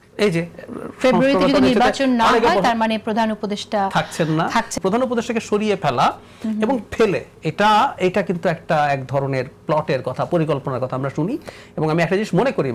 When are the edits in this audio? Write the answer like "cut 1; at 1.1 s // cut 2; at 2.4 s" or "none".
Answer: cut 1; at 4.7 s